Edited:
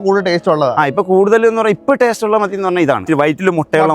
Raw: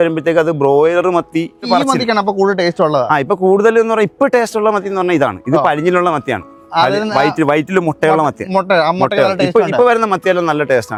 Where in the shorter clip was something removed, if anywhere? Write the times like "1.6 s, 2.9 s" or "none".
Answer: 3.0 s